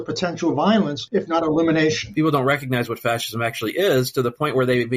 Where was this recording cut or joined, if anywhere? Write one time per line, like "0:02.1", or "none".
0:01.0
0:02.0